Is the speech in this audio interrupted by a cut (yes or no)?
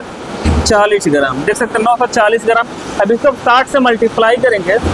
no